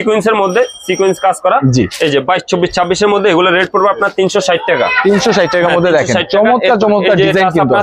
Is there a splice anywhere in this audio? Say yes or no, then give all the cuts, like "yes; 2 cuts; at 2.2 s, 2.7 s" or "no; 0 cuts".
no; 0 cuts